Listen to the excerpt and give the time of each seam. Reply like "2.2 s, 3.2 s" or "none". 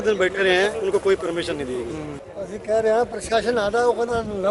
2.2 s